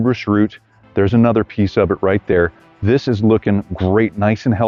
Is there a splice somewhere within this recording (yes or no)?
no